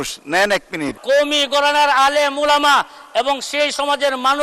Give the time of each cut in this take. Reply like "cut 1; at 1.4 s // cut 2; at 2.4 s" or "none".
cut 1; at 0.9 s